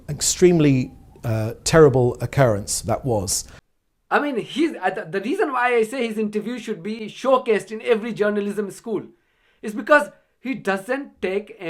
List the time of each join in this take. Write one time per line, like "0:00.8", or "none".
none

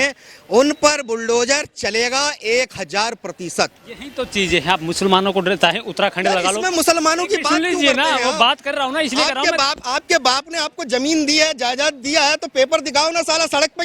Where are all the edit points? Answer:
none

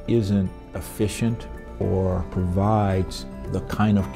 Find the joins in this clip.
none

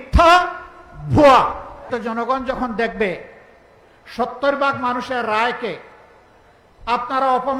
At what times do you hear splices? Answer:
0:01.9

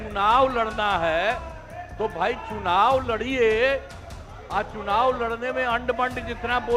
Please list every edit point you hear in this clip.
none

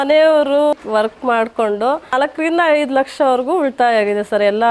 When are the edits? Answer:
0:00.7
0:02.1

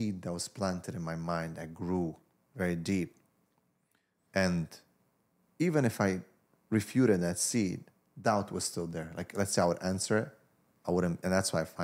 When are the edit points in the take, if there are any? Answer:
none

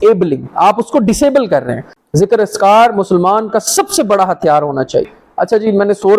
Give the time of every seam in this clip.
0:01.9
0:05.1

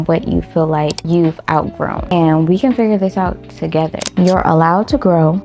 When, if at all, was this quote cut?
0:01.0
0:04.1

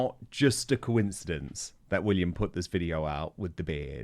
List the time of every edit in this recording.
0:01.8

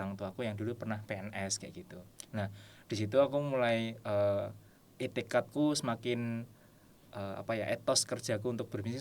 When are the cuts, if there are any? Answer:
none

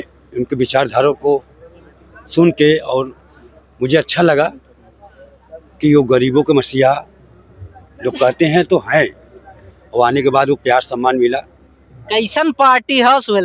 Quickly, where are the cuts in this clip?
none

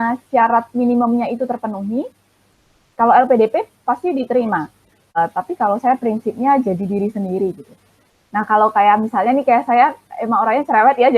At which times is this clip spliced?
0:05.2

